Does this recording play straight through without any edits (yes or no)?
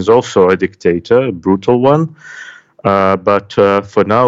yes